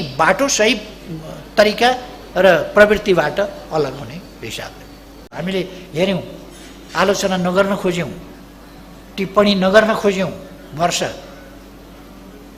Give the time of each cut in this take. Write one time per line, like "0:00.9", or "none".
0:05.4